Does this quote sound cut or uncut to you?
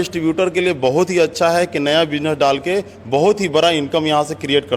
uncut